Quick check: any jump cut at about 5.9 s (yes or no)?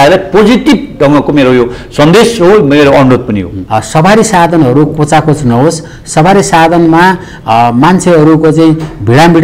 no